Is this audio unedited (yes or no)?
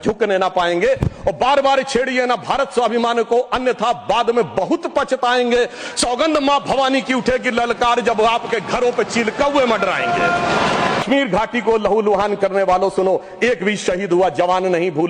no